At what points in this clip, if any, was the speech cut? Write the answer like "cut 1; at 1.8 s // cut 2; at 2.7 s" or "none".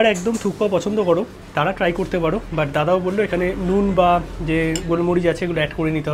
none